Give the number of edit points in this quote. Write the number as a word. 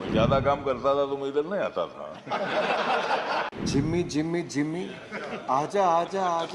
one